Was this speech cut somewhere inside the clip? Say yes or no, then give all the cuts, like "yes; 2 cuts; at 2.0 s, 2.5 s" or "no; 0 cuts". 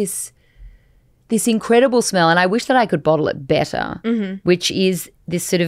no; 0 cuts